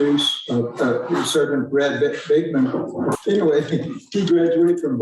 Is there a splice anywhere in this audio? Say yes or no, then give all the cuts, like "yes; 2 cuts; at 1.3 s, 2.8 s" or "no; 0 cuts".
yes; 1 cut; at 3.2 s